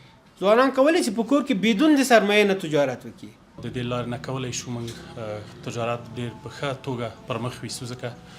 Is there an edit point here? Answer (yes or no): yes